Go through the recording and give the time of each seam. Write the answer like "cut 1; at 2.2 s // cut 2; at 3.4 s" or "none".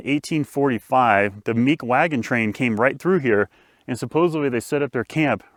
none